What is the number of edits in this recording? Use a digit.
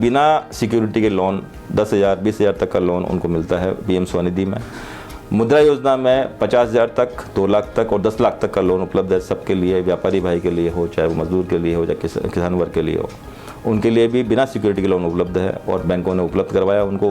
0